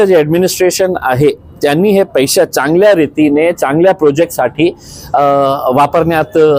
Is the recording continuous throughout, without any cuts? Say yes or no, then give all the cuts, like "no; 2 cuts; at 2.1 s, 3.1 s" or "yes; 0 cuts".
yes; 0 cuts